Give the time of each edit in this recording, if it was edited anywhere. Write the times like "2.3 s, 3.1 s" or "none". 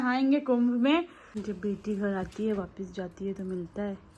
1.4 s